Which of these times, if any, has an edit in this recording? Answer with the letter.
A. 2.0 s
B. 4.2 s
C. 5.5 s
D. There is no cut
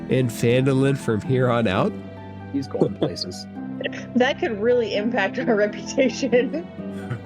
A